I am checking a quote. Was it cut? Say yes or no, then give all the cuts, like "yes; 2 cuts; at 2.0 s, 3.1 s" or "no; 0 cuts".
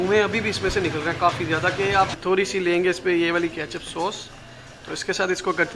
yes; 1 cut; at 2.1 s